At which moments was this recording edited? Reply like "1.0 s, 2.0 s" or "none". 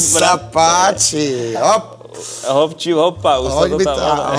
none